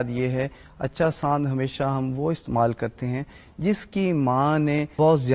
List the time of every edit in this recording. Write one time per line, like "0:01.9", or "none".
none